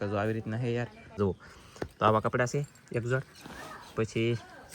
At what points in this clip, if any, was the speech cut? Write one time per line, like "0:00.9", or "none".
0:01.2